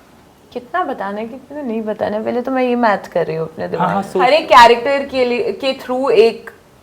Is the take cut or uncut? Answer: cut